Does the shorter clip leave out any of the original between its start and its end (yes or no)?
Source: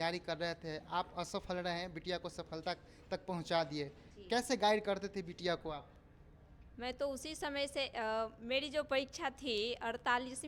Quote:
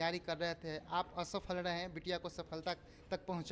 no